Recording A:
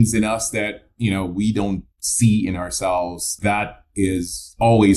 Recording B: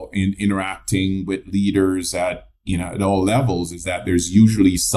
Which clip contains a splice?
A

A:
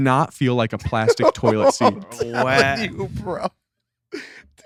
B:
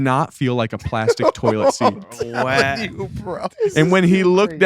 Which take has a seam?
B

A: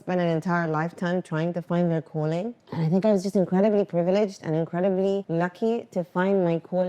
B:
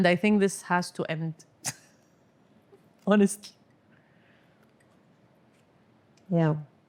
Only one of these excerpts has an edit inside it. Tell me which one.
A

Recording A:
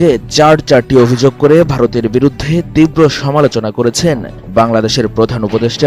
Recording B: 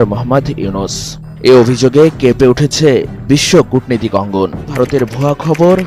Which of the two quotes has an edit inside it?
B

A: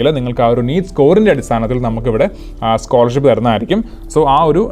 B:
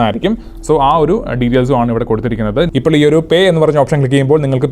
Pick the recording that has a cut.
B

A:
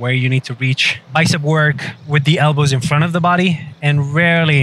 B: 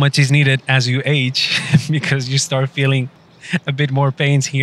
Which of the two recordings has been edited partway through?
A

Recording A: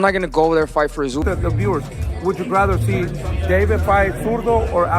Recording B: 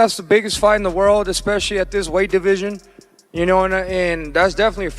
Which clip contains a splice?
A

